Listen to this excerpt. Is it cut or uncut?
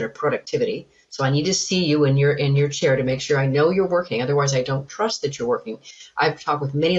uncut